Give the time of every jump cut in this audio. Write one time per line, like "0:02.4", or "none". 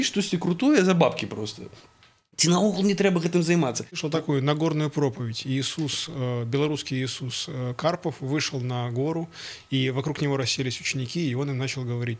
0:03.9